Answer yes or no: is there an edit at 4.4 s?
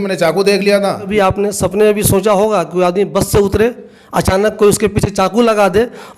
no